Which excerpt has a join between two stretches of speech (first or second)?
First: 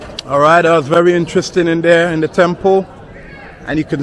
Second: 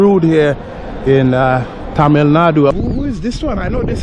second